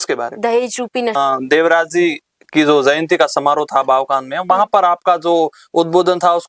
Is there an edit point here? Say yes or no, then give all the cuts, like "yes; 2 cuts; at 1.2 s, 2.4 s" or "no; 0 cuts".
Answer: yes; 1 cut; at 1.2 s